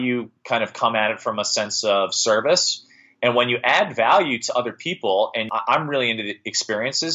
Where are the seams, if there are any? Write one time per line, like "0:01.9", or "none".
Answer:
0:05.6